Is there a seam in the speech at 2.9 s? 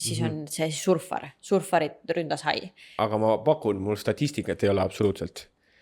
yes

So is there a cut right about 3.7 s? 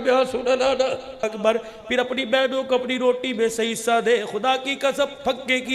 no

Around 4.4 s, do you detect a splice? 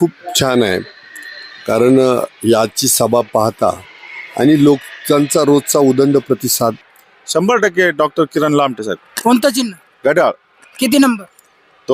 no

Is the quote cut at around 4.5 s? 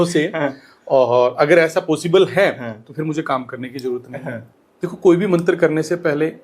yes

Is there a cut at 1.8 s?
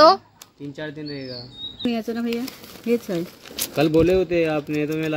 yes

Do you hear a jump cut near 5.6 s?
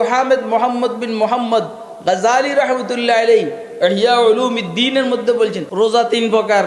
yes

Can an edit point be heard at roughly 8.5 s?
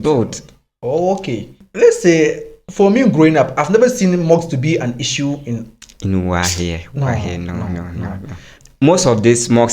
yes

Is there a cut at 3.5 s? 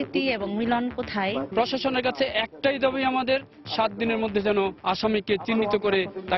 no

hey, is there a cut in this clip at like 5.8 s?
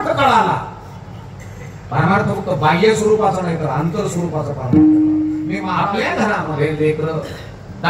yes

